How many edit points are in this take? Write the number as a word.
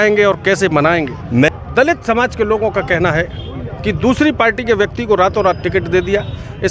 one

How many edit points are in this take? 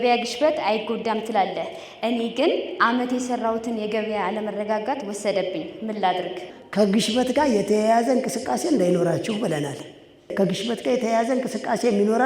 two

